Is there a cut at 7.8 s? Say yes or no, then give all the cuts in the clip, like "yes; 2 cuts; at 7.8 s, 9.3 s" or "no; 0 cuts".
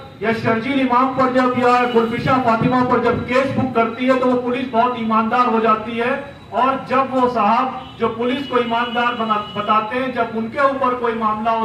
no; 0 cuts